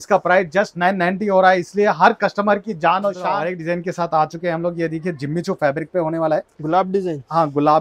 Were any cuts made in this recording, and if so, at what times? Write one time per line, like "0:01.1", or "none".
0:03.3